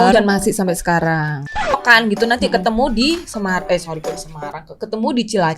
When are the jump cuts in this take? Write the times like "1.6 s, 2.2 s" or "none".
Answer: 1.8 s